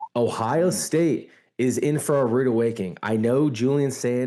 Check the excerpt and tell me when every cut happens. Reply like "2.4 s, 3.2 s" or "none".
none